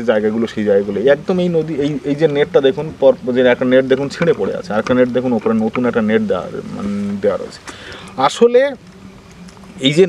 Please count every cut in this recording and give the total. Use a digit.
0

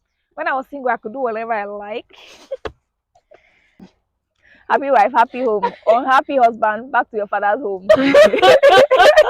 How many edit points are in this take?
1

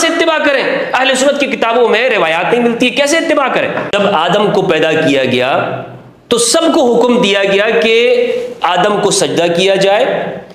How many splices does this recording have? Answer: 1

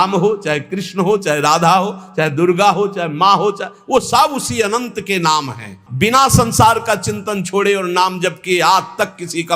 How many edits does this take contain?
1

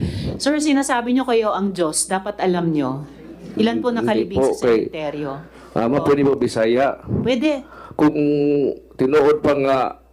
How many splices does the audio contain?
0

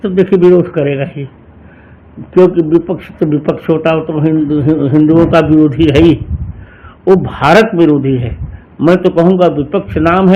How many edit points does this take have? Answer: 0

